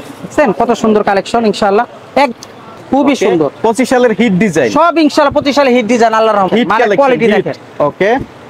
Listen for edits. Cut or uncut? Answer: cut